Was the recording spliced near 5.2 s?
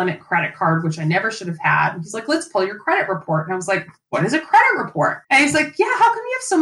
yes; 1 cut; at 5.2 s

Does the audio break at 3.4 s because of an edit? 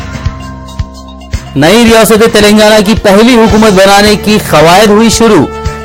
no; 1 cut; at 1.0 s

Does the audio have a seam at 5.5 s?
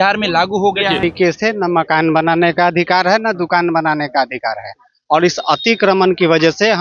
no; 1 cut; at 1.1 s

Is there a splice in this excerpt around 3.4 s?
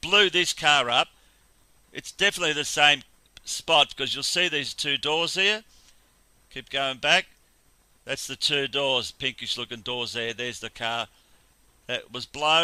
no; 0 cuts

